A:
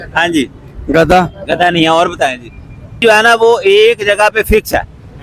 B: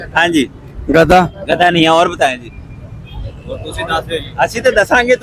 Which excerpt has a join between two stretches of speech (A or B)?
A